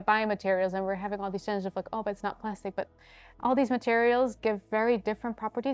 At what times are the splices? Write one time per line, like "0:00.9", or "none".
none